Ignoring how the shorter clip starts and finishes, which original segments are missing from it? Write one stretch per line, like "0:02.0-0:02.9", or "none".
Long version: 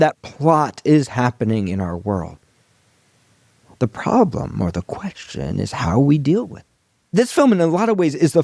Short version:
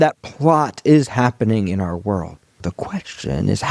0:02.6-0:04.7